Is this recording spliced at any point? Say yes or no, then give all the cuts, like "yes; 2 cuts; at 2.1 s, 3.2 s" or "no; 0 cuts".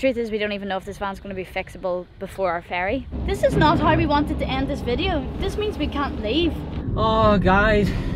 yes; 2 cuts; at 3.2 s, 6.8 s